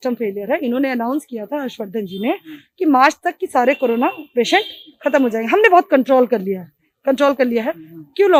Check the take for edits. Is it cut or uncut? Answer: uncut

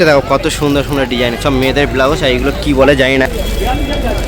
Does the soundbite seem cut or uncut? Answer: cut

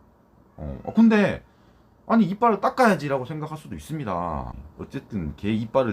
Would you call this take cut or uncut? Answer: cut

